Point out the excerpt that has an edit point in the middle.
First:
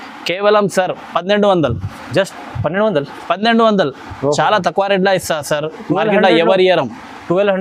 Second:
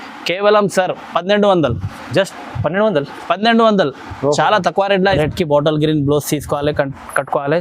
second; 1 cut; at 5.2 s

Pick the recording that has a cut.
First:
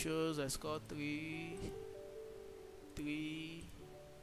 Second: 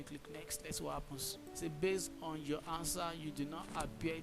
second; 1 cut; at 1.4 s

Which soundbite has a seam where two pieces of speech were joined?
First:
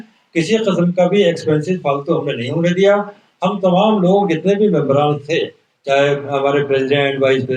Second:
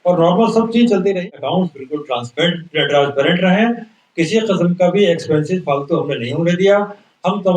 second; 1 cut; at 1.2 s

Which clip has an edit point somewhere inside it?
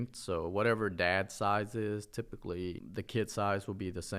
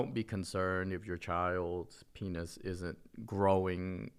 first; 1 cut; at 2.8 s

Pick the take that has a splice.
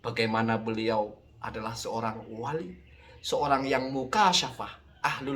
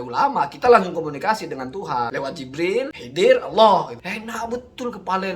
second; 2 cuts; at 2.5 s, 4.0 s

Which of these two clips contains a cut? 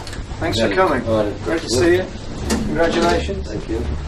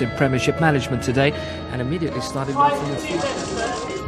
second; 1 cut; at 2.1 s

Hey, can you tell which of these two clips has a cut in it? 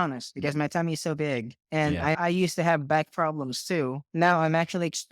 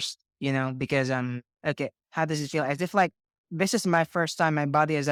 first; 2 cuts; at 2.2 s, 4.0 s

